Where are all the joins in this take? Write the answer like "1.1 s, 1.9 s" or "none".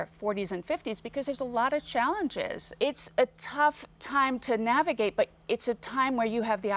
2.8 s